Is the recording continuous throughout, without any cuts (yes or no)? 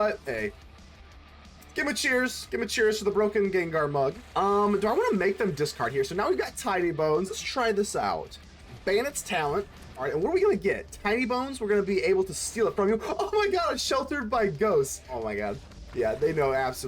no